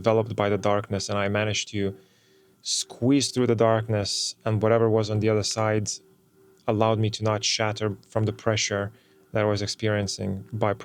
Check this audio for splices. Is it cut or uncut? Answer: uncut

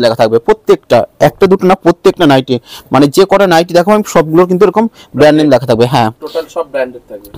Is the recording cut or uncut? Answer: uncut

